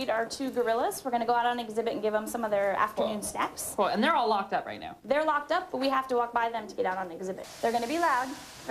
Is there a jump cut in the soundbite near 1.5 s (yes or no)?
yes